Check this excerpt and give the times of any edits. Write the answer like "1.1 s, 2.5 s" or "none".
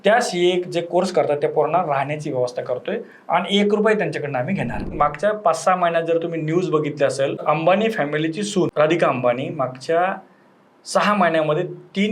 4.9 s, 7.4 s, 8.7 s

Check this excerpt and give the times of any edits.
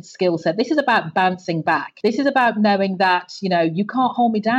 none

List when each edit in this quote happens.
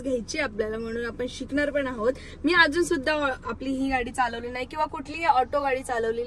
none

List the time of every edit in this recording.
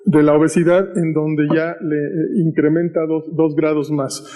2.8 s

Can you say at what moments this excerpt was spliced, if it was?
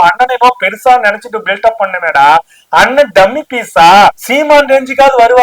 4.2 s

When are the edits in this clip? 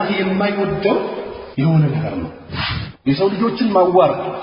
1.4 s, 2.6 s

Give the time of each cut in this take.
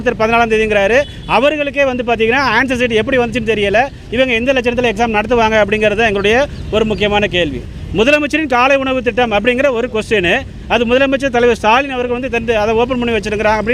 7.6 s

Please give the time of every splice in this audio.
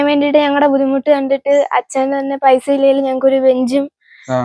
none

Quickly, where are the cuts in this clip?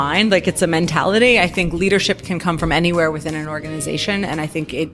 none

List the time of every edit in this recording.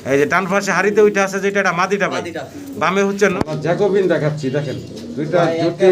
3.3 s

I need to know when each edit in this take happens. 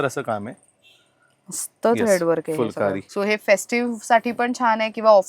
3.1 s

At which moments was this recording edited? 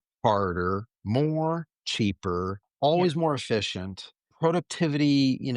2.6 s

